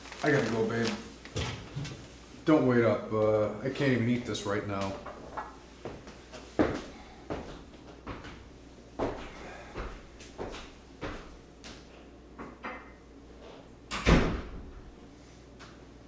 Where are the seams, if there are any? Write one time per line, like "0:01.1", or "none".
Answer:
0:08.3